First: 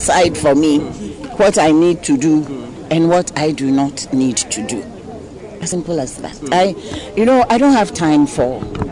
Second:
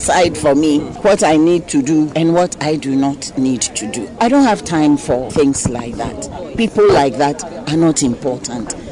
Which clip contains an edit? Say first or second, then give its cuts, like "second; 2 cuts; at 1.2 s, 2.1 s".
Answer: second; 4 cuts; at 0.9 s, 2.1 s, 4.2 s, 5.3 s